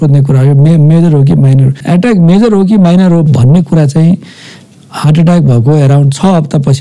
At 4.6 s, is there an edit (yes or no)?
no